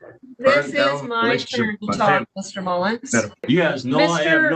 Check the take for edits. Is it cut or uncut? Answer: cut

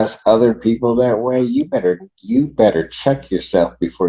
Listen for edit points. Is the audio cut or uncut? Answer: uncut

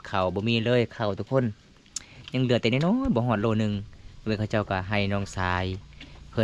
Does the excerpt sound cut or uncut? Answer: uncut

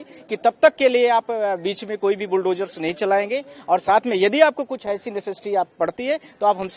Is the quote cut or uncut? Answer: uncut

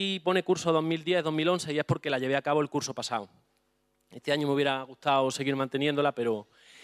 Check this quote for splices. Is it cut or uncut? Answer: uncut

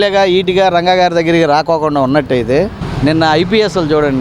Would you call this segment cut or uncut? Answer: cut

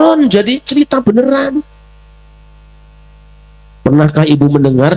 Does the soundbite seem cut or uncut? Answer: uncut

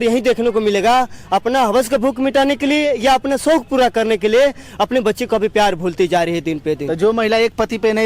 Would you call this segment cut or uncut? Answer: uncut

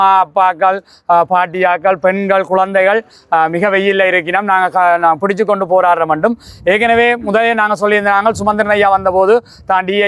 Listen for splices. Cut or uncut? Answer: uncut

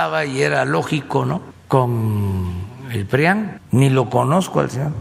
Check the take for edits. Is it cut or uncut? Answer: cut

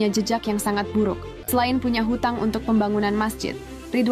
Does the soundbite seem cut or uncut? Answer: cut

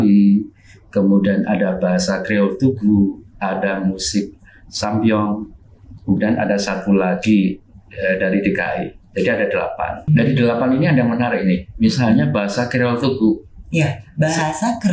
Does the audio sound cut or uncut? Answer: cut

